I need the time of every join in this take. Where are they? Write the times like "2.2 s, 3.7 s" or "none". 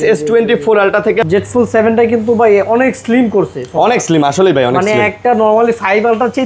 1.2 s